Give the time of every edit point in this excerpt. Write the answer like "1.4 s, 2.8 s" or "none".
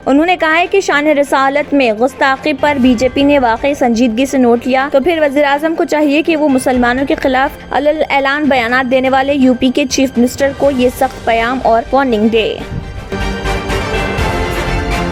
none